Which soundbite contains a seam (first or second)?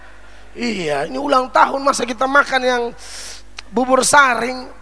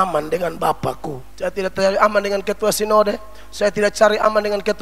second